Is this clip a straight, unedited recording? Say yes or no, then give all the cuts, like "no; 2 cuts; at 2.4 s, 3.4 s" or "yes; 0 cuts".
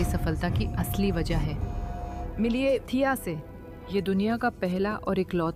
yes; 0 cuts